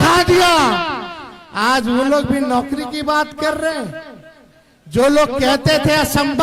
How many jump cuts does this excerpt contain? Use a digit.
0